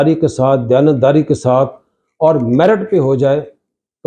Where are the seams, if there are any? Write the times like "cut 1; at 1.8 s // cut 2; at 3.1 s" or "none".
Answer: none